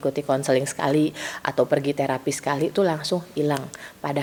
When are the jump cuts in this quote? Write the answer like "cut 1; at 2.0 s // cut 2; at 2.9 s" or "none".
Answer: none